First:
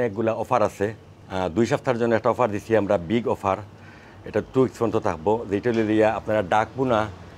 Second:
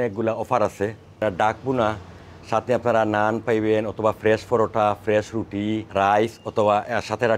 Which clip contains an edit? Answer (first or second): second